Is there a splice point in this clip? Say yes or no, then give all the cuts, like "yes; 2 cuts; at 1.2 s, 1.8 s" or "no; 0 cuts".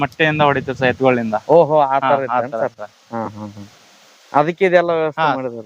no; 0 cuts